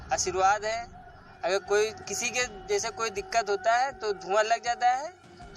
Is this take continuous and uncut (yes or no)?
yes